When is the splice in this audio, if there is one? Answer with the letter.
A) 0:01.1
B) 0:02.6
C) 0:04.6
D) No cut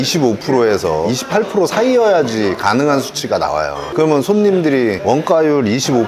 A